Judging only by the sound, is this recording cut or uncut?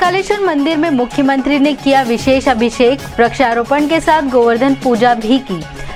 uncut